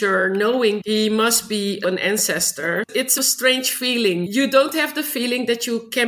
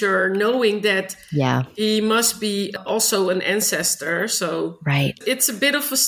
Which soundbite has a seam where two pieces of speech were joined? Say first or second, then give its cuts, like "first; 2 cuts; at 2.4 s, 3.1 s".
first; 4 cuts; at 0.8 s, 1.8 s, 3.1 s, 4.3 s